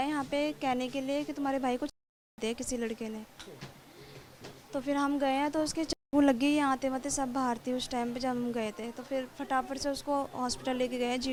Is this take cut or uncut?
uncut